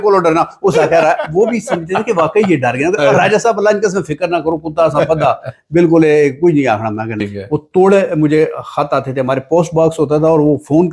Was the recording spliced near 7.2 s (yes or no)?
yes